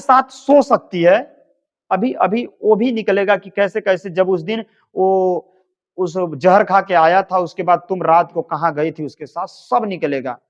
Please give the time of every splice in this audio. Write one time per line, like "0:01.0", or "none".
none